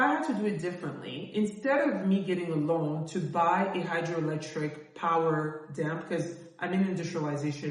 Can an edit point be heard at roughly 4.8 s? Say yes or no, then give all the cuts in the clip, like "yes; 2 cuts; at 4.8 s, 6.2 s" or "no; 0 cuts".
no; 0 cuts